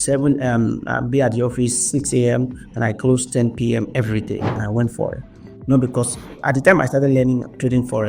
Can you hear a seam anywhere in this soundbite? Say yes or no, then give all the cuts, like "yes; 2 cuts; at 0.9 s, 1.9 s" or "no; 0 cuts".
yes; 1 cut; at 4.6 s